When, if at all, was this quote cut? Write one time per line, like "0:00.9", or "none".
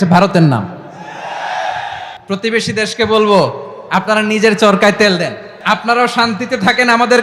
0:02.1
0:05.5